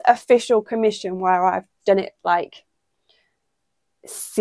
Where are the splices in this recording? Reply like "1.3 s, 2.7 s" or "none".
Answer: none